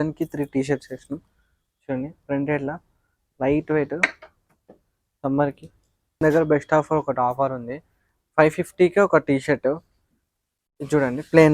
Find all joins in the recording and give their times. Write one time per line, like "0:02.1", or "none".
0:06.2